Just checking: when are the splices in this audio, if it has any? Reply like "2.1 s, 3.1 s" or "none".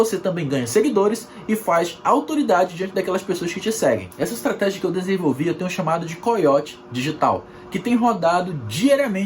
4.1 s